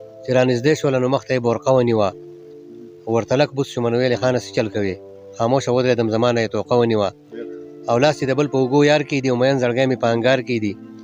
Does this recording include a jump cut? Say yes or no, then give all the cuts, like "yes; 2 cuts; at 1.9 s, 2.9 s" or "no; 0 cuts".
no; 0 cuts